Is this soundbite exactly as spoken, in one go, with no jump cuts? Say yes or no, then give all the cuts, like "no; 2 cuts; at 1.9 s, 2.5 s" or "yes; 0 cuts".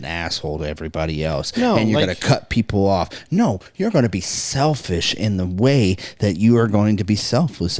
yes; 0 cuts